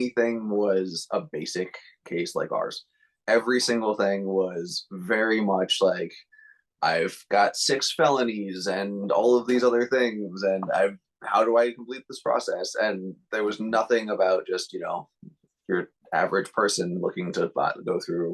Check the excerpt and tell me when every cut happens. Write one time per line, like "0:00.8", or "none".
none